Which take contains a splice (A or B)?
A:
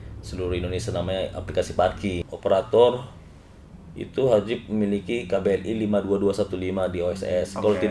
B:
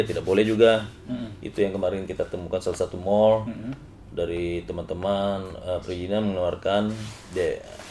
A